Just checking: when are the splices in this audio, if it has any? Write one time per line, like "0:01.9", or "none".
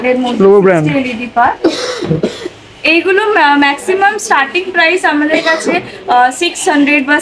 none